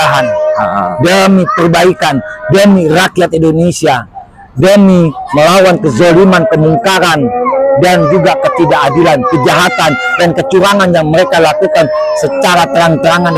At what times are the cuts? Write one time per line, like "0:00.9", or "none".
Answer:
none